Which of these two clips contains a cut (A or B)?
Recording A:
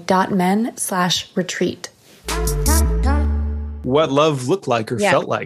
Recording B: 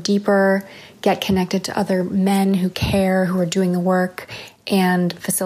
A